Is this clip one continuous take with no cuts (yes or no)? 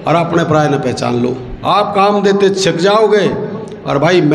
no